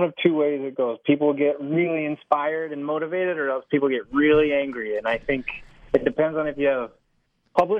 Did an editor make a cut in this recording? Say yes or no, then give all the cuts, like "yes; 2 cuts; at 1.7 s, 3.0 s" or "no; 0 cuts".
no; 0 cuts